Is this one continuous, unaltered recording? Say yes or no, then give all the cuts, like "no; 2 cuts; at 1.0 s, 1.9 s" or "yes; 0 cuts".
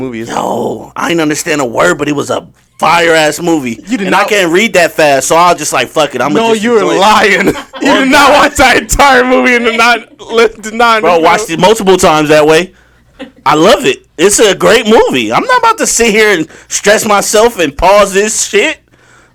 yes; 0 cuts